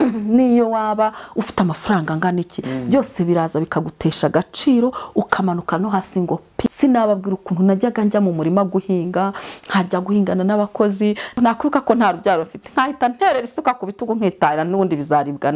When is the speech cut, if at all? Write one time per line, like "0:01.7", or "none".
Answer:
0:06.7
0:11.3